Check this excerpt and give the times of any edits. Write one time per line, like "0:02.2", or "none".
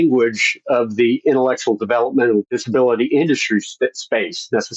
0:02.5